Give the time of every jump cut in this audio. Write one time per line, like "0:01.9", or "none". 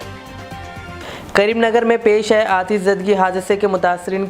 0:01.0